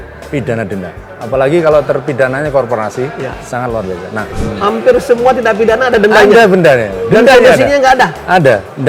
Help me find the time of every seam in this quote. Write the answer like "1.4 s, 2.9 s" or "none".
4.3 s

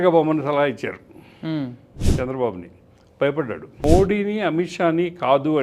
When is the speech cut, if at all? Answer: 3.8 s

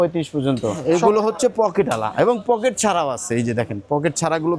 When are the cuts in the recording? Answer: 0.9 s

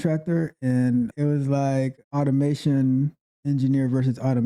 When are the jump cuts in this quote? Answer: 1.1 s, 2.0 s

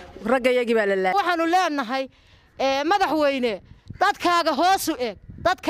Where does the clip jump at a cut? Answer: 1.1 s

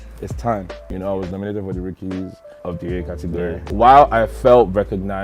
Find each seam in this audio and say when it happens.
1.0 s, 3.6 s

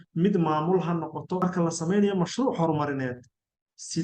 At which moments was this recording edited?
1.4 s

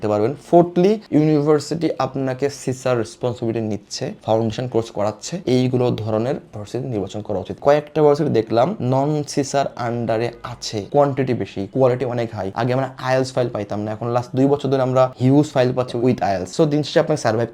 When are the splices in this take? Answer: 7.6 s, 10.9 s, 16.5 s

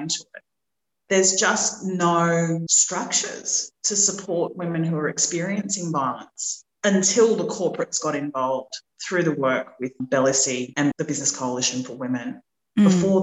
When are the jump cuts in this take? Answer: 2.8 s, 10.7 s

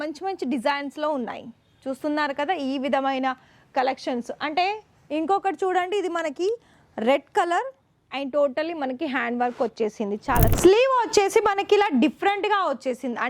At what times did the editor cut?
10.5 s

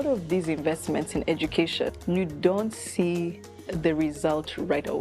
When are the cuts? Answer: 2.0 s

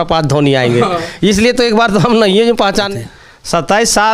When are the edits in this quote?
2.9 s

